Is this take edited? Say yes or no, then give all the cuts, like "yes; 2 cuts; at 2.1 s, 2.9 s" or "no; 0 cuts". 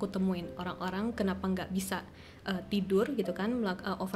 no; 0 cuts